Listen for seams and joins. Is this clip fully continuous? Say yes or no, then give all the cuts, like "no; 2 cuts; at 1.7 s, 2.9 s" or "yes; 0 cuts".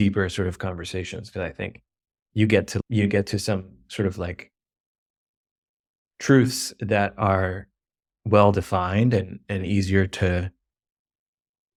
yes; 0 cuts